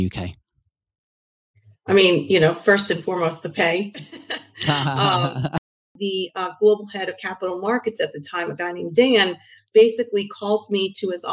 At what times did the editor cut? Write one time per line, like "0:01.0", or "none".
0:05.8